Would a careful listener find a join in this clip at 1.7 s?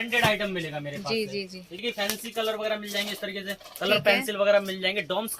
yes; 1 cut; at 1.7 s

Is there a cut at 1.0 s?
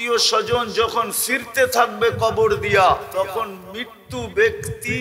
no; 1 cut; at 3.1 s

